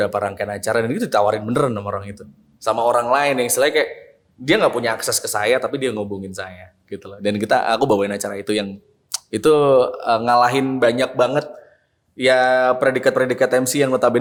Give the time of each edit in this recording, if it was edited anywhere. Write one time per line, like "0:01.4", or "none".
none